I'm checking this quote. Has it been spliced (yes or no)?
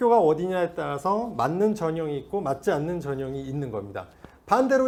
no